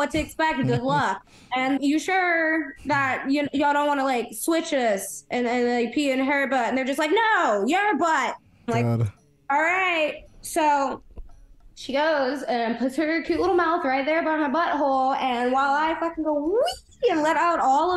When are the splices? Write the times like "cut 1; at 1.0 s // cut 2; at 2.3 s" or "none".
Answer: cut 1; at 1.8 s